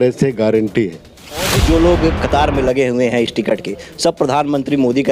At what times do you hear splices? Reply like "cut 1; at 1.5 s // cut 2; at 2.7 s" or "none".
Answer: cut 1; at 1.6 s